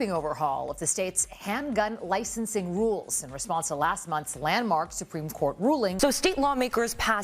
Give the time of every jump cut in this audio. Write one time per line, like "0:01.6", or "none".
0:05.9